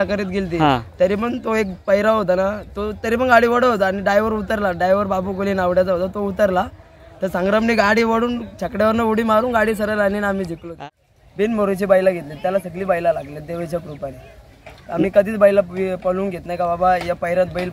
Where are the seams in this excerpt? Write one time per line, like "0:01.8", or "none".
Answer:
0:10.8

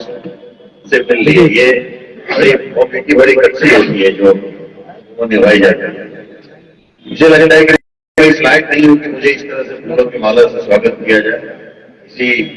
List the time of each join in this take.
none

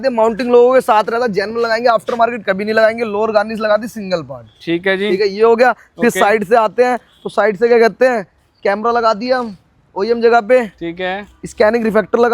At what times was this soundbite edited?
none

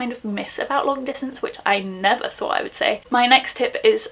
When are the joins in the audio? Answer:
0:03.0

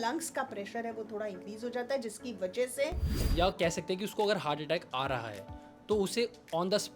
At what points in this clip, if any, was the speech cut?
0:03.2

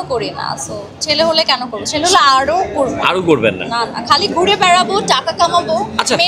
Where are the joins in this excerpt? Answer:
none

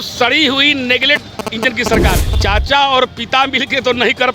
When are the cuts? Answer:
0:02.3

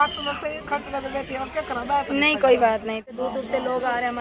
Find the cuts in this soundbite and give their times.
0:03.1

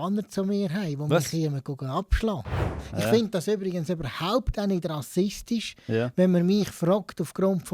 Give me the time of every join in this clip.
0:02.8

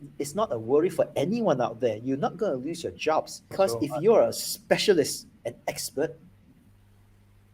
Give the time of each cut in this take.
0:03.5

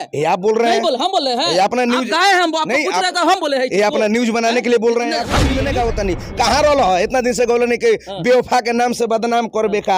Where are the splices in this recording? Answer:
0:05.4

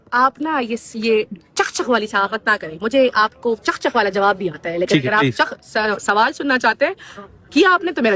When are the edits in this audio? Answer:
none

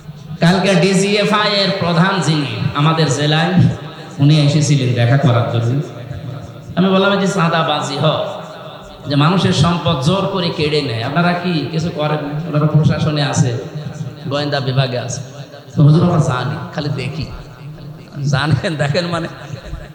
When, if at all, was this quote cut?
none

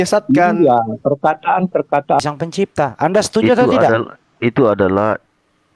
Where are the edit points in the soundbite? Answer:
0:02.2

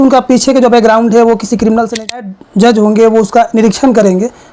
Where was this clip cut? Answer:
0:02.2

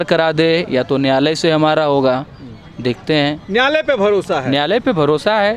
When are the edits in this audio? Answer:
none

